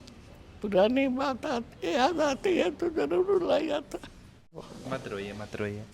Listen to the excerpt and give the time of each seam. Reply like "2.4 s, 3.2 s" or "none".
4.7 s